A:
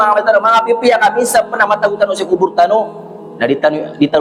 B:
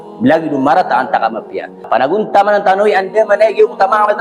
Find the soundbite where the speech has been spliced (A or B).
B